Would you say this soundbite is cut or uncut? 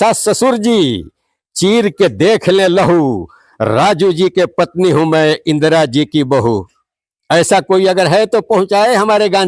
uncut